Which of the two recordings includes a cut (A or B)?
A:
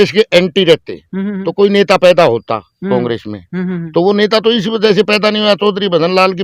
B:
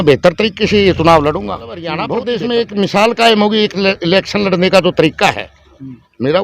B